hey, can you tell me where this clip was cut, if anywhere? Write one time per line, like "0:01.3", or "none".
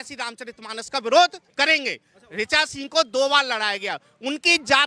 0:02.2